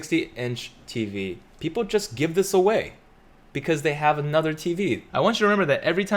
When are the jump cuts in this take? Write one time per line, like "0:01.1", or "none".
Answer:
0:05.0